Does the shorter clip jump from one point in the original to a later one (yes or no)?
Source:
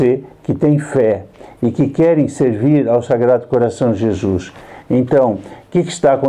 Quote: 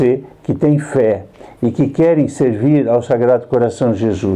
no